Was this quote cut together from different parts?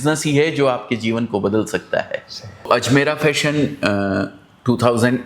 yes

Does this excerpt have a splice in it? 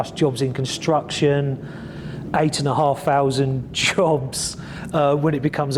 no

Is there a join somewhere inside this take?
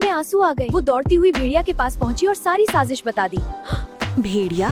no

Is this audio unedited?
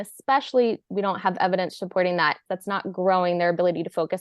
no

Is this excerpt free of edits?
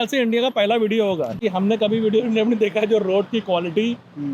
no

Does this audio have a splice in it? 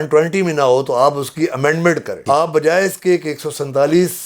no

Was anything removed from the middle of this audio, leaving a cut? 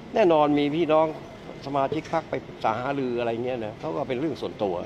no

